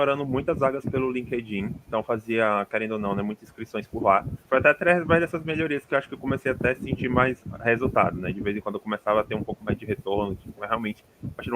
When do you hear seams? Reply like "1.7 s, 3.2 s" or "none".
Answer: 4.4 s

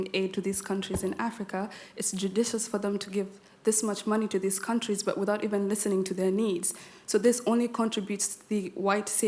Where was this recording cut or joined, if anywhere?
none

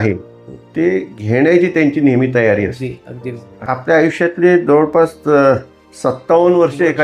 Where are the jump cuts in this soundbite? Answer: 3.6 s

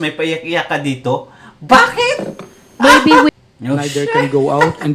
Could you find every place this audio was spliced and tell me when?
3.3 s

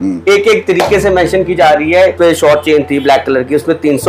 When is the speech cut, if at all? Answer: 2.1 s

